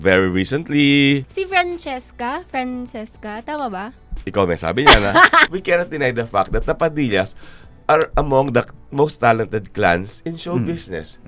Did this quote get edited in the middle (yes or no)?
yes